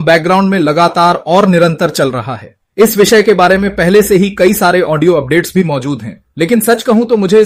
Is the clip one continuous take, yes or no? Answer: yes